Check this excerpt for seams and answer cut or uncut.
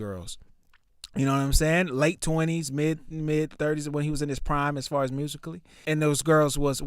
cut